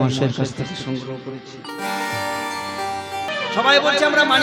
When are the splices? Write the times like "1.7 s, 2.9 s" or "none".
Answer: 3.3 s